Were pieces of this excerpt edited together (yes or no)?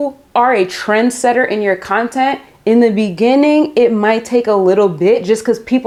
no